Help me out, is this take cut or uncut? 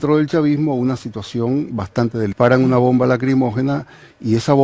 uncut